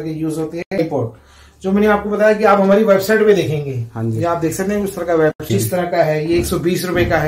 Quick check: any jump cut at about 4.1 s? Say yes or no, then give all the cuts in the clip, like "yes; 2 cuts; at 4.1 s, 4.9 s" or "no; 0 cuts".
no; 2 cuts; at 0.8 s, 5.4 s